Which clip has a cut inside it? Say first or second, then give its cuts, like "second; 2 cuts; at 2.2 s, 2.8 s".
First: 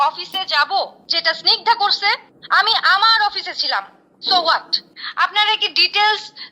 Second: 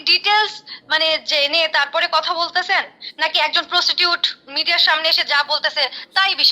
first; 1 cut; at 4.8 s